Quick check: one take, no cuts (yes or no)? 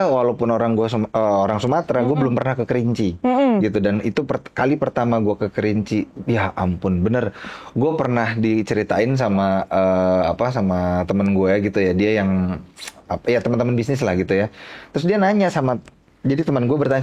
yes